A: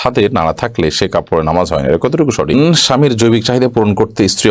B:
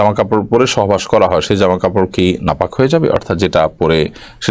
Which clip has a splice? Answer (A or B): A